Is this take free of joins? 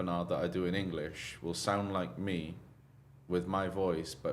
yes; 0 cuts

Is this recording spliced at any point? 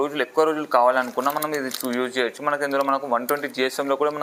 no; 0 cuts

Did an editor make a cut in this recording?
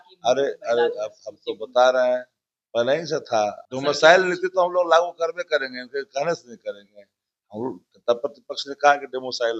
yes; 1 cut; at 3.7 s

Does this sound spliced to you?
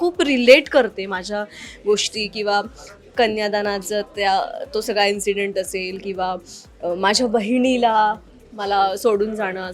no; 0 cuts

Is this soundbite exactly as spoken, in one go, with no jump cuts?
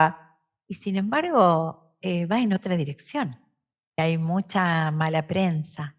no; 1 cut; at 4.0 s

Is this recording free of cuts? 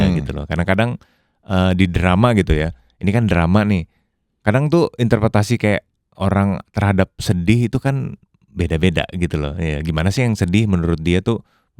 yes; 0 cuts

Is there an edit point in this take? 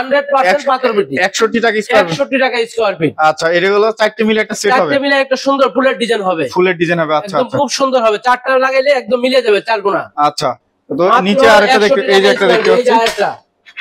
no; 0 cuts

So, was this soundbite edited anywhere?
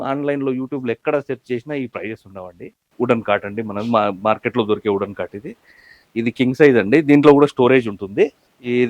yes; 1 cut; at 2.8 s

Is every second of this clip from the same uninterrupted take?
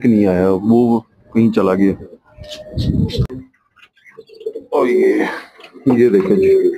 no; 1 cut; at 3.2 s

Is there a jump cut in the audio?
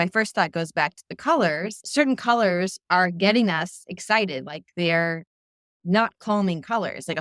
no; 0 cuts

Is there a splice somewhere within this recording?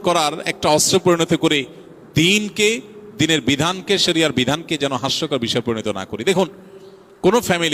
no; 0 cuts

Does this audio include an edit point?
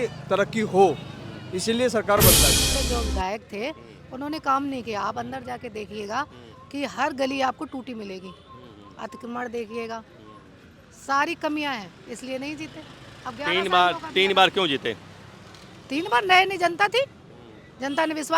yes; 1 cut; at 2.6 s

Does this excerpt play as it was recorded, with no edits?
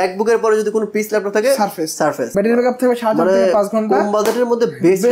no; 1 cut; at 2.3 s

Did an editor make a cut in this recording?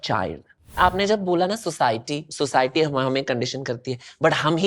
yes; 2 cuts; at 0.8 s, 2.3 s

